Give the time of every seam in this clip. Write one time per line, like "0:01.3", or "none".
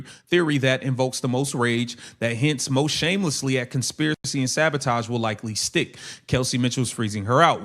none